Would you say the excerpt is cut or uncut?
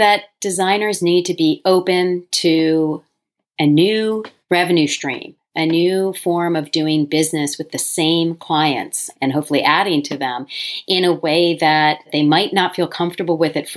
uncut